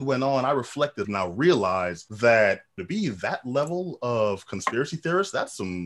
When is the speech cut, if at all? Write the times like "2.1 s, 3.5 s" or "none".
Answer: 1.1 s, 2.0 s, 2.8 s